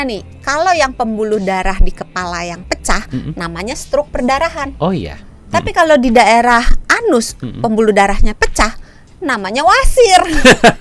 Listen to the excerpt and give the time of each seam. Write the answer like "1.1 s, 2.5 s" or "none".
none